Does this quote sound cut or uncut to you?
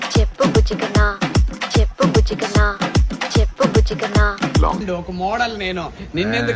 cut